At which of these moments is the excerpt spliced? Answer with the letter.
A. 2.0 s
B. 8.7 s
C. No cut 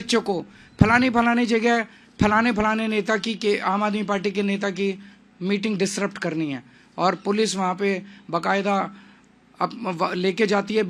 C